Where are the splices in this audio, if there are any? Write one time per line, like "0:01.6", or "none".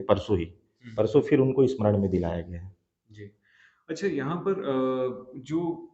none